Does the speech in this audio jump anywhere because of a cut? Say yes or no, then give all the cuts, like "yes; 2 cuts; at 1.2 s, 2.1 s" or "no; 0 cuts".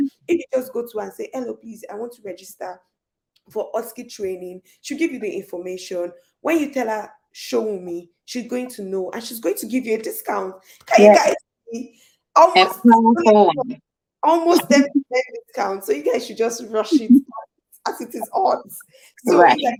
no; 0 cuts